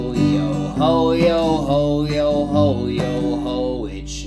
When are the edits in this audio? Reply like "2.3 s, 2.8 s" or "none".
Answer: none